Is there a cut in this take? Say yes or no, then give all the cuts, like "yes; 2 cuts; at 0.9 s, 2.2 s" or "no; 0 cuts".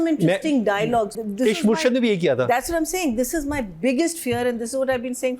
yes; 1 cut; at 1.2 s